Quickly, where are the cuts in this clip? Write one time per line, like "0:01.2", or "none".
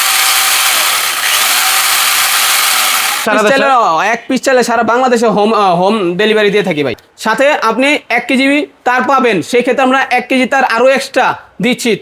0:03.2
0:06.9